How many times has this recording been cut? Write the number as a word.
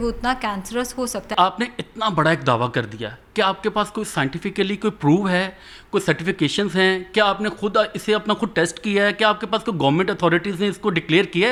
zero